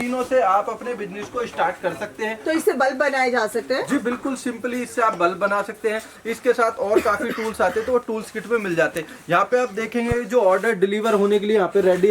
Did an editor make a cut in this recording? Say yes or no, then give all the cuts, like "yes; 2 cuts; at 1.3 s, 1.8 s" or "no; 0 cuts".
no; 0 cuts